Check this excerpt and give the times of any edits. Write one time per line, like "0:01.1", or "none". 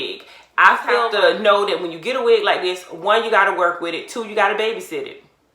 0:01.0

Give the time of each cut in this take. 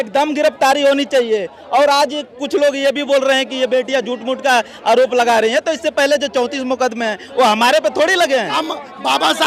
0:08.5

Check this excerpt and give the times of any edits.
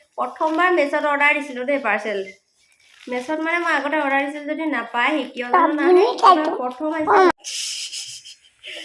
0:07.3

